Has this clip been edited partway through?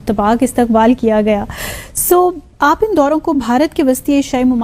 yes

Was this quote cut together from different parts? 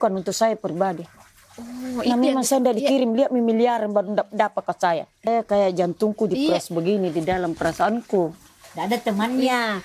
yes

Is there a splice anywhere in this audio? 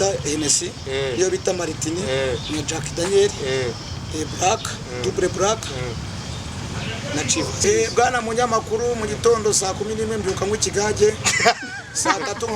yes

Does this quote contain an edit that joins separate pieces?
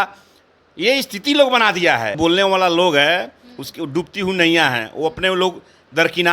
yes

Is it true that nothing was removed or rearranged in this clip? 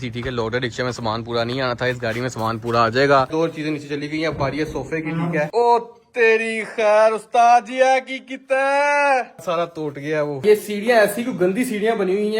no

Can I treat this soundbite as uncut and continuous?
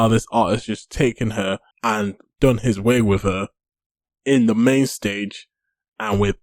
no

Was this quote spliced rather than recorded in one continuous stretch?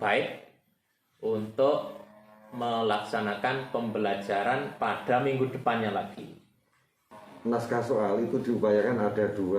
yes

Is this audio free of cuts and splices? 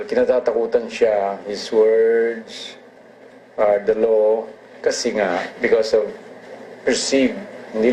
no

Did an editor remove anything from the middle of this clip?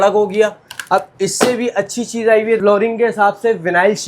yes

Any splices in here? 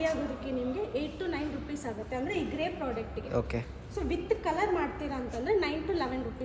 no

